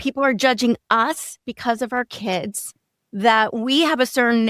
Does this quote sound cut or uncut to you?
uncut